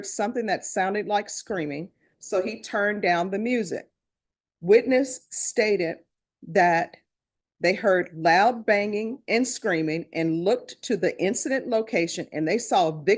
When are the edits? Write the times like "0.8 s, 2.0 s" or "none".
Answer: none